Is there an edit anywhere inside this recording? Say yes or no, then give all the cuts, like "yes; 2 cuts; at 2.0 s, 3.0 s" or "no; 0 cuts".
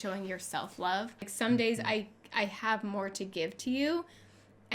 yes; 1 cut; at 1.3 s